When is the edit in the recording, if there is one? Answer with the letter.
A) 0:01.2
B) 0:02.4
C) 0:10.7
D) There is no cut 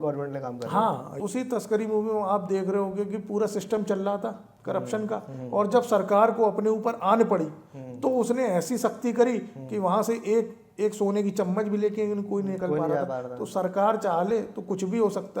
A